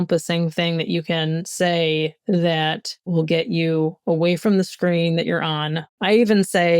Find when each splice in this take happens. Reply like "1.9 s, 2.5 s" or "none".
3.1 s, 5.8 s